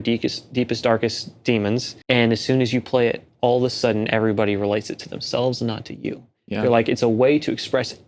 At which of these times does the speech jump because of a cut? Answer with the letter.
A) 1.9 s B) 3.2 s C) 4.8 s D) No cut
A